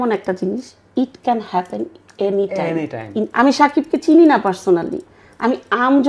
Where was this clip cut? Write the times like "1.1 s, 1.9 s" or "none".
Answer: 3.2 s